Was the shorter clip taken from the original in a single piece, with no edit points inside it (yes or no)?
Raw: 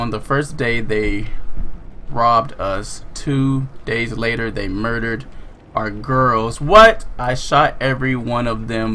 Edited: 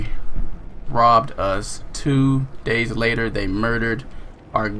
yes